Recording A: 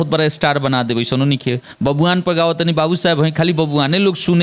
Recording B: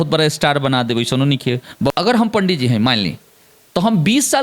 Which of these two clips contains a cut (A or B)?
B